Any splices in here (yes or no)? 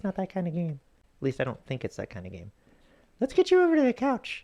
yes